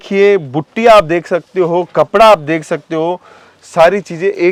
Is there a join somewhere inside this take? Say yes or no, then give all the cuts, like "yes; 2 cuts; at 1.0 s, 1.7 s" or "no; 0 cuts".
no; 0 cuts